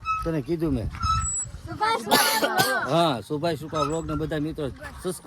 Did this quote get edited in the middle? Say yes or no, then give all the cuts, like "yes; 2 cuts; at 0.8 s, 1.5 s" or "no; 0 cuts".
no; 0 cuts